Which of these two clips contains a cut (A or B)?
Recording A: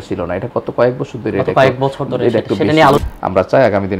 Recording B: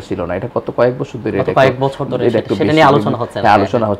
A